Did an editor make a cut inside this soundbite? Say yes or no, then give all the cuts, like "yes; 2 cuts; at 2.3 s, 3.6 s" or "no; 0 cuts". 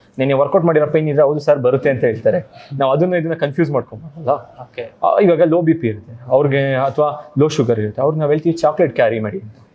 no; 0 cuts